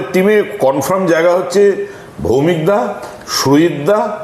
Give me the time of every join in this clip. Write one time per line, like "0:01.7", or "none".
none